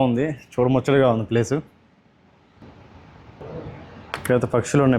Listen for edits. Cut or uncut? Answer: cut